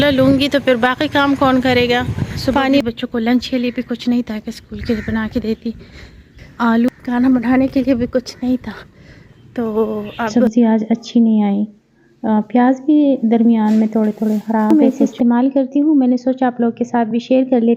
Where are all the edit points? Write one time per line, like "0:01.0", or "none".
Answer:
0:02.8
0:06.9
0:10.2
0:14.7